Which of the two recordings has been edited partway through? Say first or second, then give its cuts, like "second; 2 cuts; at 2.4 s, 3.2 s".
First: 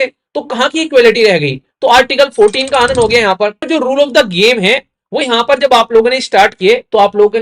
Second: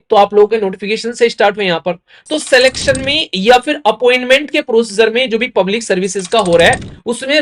first; 1 cut; at 3.7 s